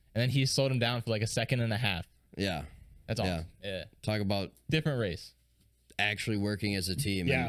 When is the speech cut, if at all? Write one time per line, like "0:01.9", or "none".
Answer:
none